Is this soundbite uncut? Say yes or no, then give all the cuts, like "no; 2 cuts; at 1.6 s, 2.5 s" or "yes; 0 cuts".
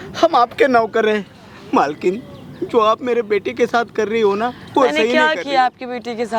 yes; 0 cuts